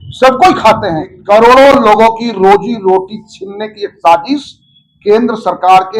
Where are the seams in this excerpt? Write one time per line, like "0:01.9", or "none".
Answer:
0:01.1